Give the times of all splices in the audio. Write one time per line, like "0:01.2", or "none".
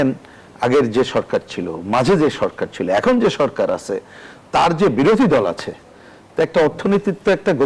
none